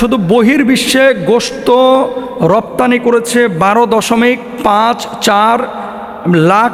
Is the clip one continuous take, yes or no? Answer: yes